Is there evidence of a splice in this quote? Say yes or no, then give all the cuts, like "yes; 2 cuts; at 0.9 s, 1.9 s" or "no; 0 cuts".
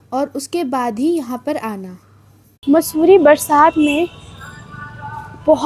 yes; 1 cut; at 2.6 s